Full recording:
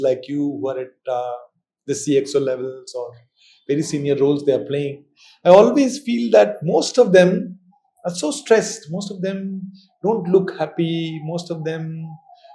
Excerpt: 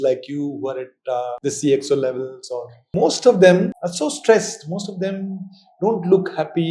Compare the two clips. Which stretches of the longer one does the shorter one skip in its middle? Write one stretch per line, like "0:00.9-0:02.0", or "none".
0:01.4-0:01.8
0:03.3-0:06.6
0:07.5-0:08.0